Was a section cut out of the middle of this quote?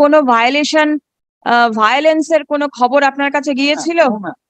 no; 0 cuts

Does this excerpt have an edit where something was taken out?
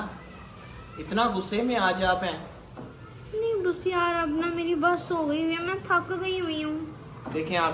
no; 0 cuts

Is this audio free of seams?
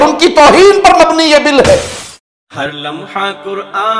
no; 1 cut; at 2.0 s

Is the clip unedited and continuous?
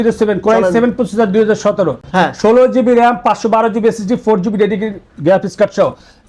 yes; 0 cuts

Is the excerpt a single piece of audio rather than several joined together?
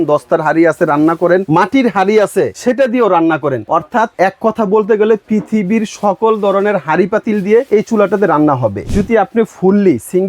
no; 5 cuts; at 1.4 s, 2.5 s, 3.9 s, 7.7 s, 8.9 s

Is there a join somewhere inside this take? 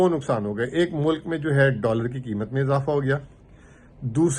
no; 0 cuts

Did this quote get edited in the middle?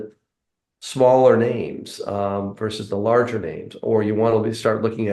no; 0 cuts

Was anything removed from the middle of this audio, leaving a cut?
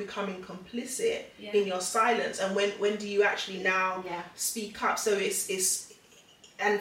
no; 0 cuts

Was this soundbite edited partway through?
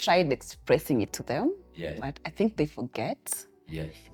no; 0 cuts

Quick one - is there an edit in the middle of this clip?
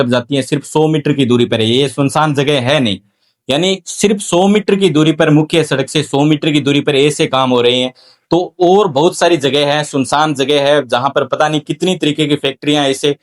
no; 0 cuts

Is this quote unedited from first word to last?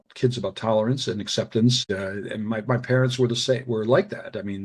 no; 1 cut; at 1.8 s

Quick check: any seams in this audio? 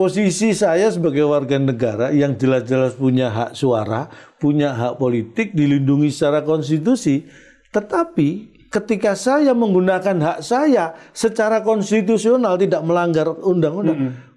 no; 0 cuts

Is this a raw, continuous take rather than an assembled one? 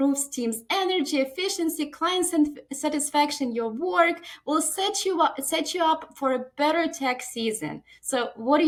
yes; 0 cuts

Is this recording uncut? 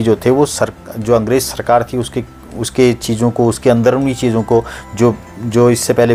yes; 0 cuts

